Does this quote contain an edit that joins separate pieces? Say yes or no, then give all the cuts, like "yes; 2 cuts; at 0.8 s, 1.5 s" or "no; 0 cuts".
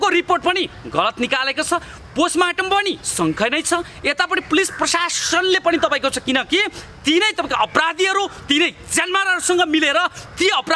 no; 0 cuts